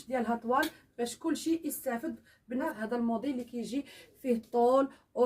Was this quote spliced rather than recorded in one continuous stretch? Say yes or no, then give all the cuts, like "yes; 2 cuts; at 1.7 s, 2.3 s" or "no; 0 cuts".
yes; 1 cut; at 2.6 s